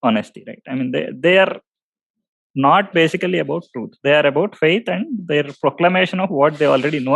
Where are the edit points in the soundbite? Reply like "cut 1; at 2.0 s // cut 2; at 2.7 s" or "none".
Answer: none